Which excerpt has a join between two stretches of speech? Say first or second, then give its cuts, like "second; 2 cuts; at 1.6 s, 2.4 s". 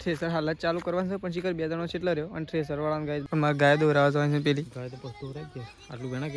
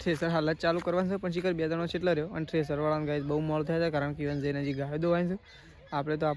first; 1 cut; at 3.2 s